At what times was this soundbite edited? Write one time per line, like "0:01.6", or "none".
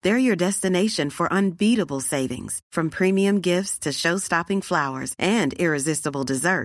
none